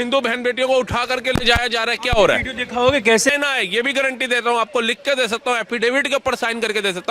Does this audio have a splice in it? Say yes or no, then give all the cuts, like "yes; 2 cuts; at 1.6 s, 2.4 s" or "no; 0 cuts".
yes; 1 cut; at 3.3 s